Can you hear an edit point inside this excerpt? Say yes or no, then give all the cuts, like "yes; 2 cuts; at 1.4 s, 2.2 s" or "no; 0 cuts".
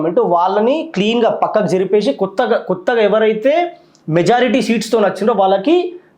no; 0 cuts